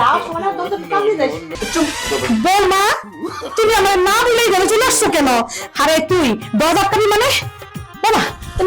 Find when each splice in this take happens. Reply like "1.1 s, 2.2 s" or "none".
1.5 s